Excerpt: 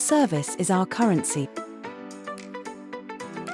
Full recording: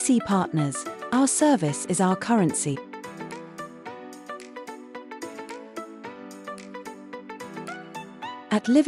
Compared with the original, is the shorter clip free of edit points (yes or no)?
no